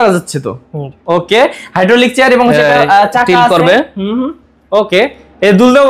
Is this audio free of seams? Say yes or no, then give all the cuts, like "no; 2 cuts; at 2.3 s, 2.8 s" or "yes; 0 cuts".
yes; 0 cuts